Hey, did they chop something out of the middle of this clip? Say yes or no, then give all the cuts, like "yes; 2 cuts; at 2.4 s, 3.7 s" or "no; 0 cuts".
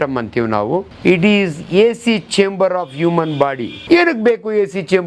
yes; 2 cuts; at 0.9 s, 3.7 s